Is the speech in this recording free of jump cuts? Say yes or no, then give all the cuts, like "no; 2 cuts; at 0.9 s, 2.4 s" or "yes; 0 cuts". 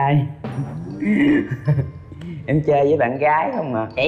yes; 0 cuts